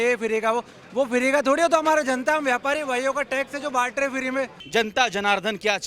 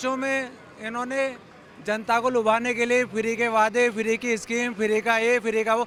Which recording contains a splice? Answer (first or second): first